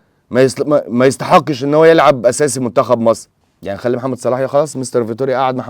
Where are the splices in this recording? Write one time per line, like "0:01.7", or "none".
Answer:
0:03.3